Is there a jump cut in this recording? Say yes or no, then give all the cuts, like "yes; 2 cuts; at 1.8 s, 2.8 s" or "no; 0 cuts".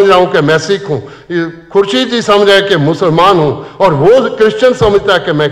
no; 0 cuts